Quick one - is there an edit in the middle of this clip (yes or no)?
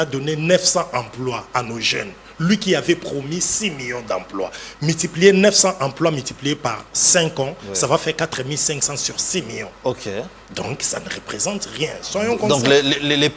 no